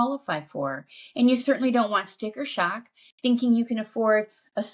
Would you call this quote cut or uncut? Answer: uncut